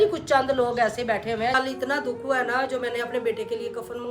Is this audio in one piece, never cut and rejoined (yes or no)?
no